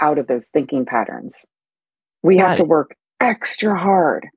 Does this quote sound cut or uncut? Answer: cut